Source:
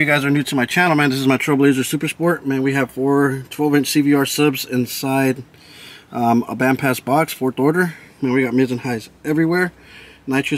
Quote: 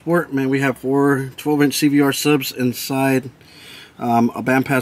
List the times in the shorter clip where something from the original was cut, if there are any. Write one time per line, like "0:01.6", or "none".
none